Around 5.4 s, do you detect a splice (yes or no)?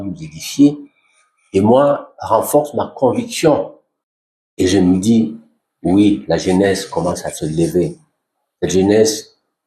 no